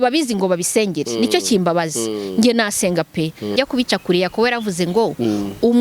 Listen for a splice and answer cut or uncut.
cut